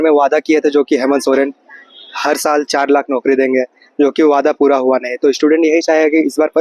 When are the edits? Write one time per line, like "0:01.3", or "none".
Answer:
none